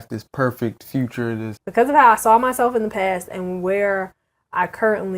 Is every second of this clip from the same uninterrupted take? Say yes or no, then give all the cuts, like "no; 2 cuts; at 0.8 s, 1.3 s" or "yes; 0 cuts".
no; 1 cut; at 1.6 s